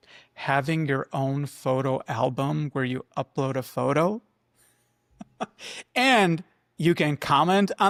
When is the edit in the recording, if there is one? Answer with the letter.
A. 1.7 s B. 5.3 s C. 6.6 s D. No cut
D